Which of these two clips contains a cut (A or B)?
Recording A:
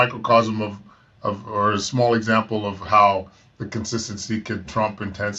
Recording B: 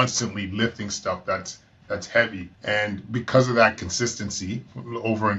B